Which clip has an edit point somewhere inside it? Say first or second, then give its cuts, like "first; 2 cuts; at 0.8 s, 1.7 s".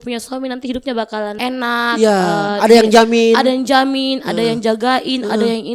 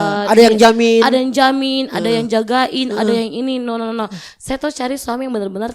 first; 1 cut; at 1.3 s